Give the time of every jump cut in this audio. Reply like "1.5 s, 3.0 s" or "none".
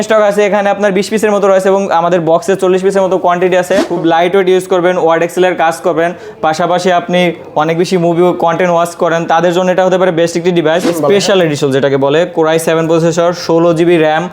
3.9 s, 10.9 s